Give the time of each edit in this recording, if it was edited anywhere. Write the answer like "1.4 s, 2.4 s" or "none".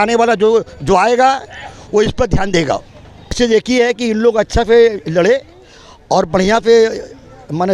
3.4 s